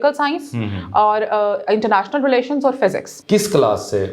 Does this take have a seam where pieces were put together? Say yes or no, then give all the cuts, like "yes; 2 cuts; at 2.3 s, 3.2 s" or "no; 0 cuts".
yes; 1 cut; at 3.1 s